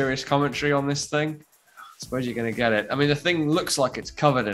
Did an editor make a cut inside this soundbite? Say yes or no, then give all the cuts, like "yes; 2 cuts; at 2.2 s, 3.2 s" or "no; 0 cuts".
no; 0 cuts